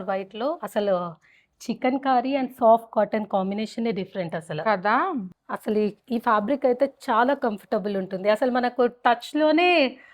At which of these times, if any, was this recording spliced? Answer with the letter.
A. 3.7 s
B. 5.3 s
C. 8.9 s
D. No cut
B